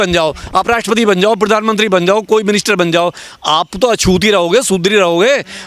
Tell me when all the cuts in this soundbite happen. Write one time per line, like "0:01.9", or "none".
none